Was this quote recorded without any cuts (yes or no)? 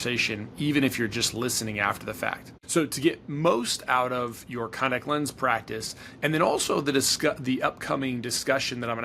no